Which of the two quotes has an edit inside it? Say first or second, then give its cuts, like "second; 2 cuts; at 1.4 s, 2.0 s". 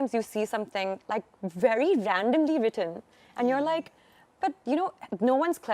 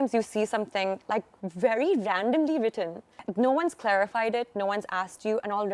second; 1 cut; at 3.2 s